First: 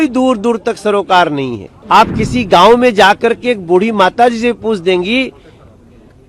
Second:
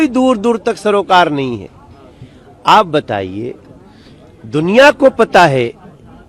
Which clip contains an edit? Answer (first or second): first